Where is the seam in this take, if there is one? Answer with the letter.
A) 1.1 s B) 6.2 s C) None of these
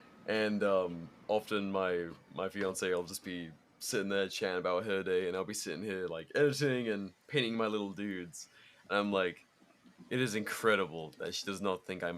A